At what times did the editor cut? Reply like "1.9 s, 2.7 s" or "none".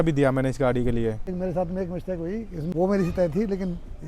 1.3 s, 2.6 s